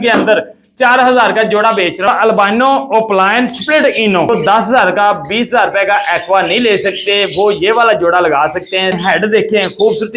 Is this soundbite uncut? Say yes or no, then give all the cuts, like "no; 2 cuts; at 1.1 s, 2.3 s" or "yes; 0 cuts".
no; 3 cuts; at 2.1 s, 4.3 s, 9.0 s